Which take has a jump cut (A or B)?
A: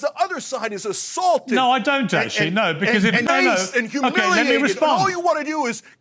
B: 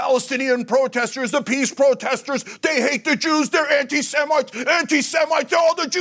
A